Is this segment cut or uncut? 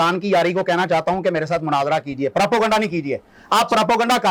uncut